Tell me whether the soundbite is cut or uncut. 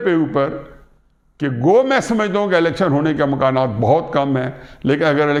uncut